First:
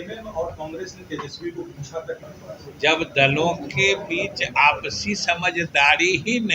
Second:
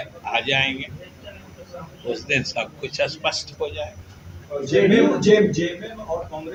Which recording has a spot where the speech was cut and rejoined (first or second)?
first